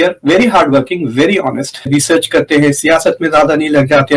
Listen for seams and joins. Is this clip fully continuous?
no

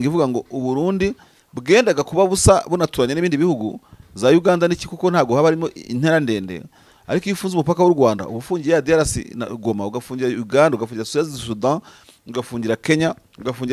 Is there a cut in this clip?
no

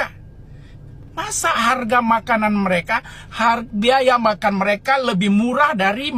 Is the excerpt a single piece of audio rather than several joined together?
yes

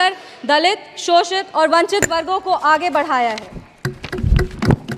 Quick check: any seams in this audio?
no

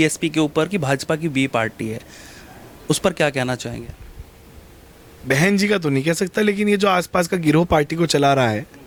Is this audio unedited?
yes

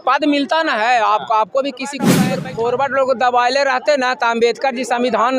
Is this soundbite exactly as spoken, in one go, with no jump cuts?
no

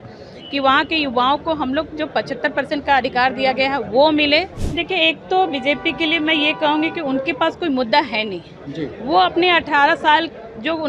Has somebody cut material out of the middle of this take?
yes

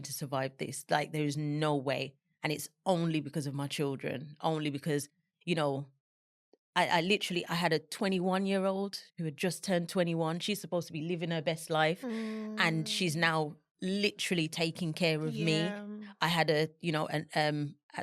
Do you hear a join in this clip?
no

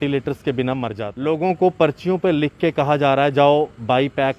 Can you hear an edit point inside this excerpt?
yes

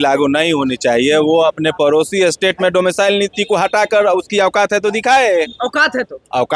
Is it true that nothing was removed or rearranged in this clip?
yes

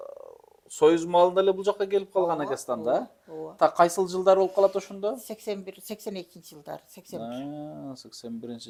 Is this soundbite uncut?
yes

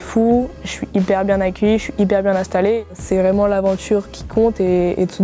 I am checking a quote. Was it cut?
yes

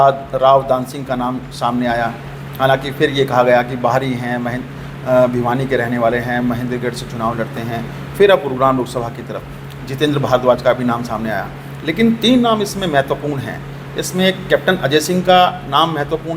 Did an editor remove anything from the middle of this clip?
no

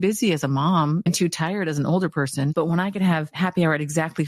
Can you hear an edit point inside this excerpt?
yes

